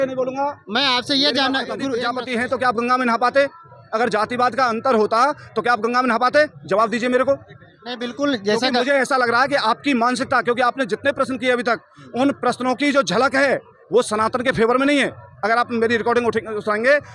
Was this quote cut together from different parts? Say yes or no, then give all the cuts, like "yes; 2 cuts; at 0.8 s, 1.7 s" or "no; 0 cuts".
yes; 1 cut; at 2.0 s